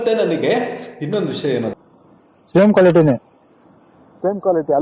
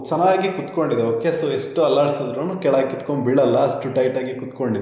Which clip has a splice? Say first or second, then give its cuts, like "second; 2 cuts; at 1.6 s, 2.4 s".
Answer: first; 1 cut; at 1.7 s